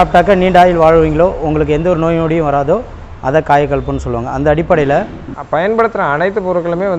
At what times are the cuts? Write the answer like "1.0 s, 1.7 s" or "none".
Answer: 5.3 s